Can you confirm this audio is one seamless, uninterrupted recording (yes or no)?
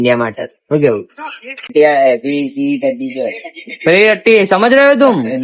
no